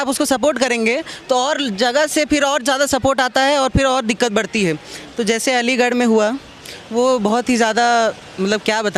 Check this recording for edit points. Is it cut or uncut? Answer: uncut